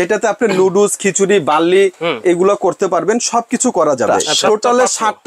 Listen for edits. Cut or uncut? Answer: cut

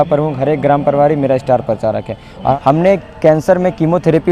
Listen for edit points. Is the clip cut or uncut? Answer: cut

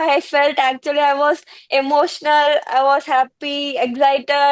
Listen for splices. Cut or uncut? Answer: uncut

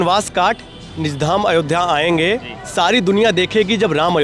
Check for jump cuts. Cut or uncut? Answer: uncut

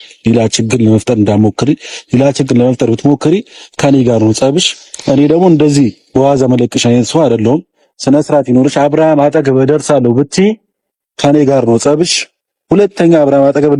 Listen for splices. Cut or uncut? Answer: uncut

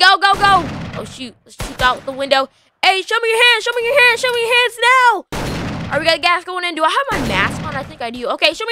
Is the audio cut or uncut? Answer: uncut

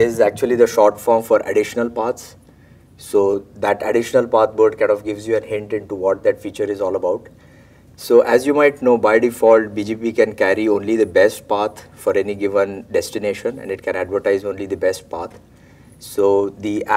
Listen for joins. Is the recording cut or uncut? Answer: uncut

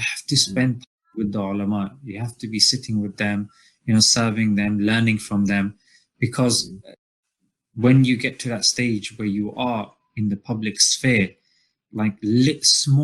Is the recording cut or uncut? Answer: uncut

